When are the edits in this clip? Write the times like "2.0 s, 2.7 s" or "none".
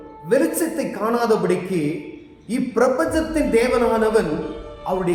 none

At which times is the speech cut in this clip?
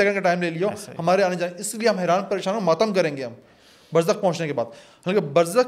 none

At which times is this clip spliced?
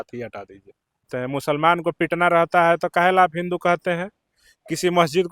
1.1 s

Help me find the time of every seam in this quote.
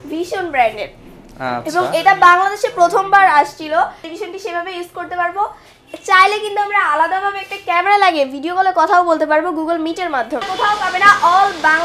4.0 s, 10.4 s

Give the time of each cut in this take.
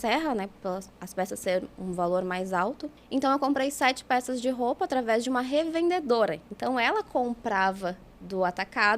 2.9 s

